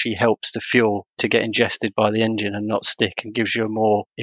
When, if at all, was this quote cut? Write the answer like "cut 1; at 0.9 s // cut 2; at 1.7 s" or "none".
none